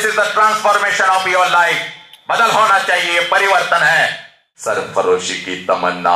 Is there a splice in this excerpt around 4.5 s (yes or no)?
yes